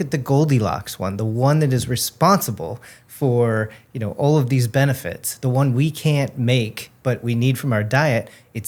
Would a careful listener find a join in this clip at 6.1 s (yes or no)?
no